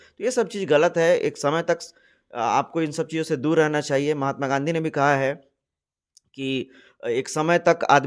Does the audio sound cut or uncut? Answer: uncut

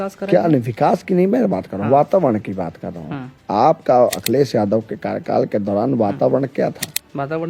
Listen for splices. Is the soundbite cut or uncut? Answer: uncut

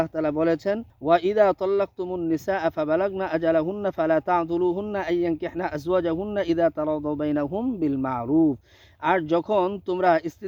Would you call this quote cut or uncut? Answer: cut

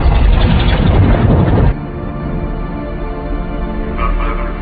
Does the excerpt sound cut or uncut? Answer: uncut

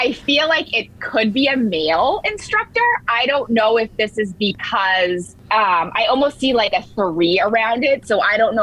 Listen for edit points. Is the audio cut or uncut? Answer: uncut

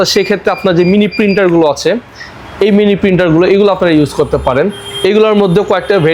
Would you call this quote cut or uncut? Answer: uncut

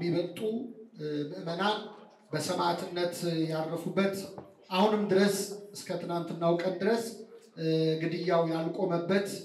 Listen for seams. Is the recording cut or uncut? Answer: uncut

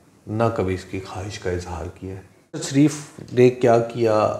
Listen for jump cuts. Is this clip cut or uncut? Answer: cut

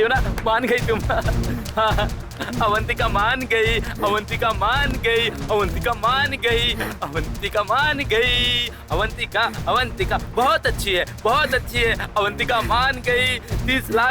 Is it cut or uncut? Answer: uncut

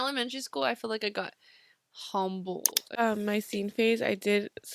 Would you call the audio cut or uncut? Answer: cut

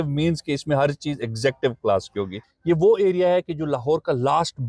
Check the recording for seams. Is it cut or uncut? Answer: cut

